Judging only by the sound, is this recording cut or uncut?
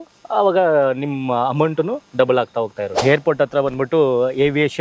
cut